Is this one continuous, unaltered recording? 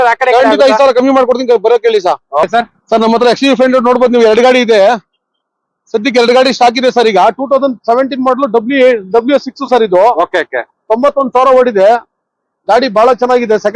no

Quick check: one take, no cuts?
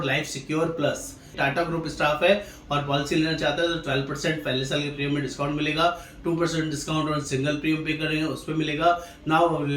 no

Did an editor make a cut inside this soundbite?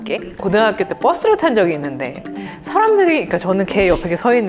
yes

